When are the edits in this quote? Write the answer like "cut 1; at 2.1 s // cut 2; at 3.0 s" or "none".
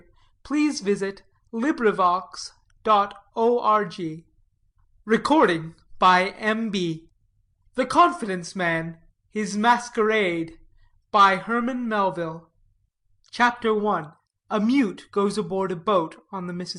none